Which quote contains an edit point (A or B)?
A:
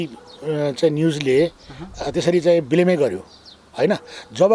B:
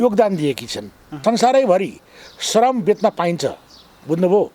B